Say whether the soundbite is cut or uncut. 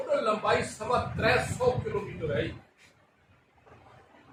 uncut